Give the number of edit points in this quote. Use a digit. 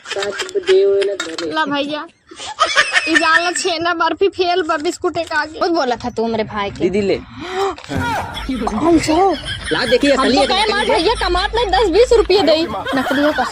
1